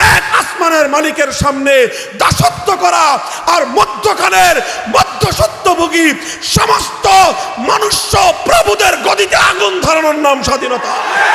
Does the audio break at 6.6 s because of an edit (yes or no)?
no